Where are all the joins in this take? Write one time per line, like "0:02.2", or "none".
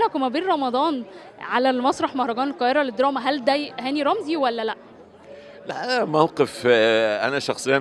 none